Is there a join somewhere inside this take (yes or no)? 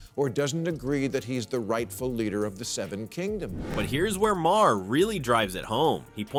no